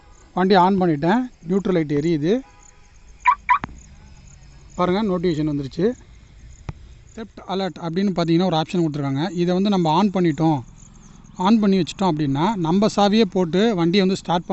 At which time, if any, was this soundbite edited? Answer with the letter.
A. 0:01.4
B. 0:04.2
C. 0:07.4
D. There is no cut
C